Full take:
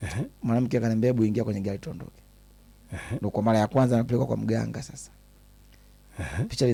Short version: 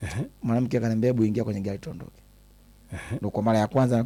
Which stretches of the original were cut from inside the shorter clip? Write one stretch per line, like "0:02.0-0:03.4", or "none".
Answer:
none